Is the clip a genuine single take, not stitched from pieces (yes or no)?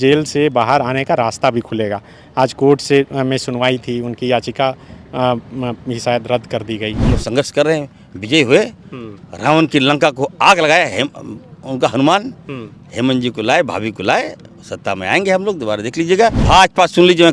no